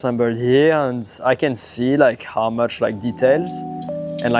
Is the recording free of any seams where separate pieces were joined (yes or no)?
yes